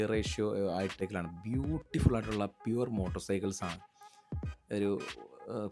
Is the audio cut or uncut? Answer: cut